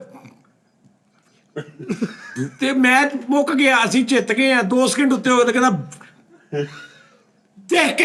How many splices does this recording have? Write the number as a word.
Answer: zero